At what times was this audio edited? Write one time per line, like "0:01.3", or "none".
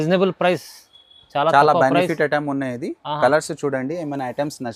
none